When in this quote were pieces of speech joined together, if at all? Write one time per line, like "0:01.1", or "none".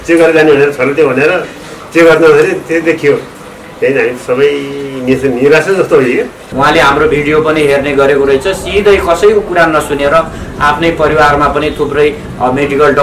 0:06.4